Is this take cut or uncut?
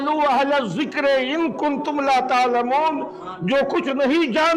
uncut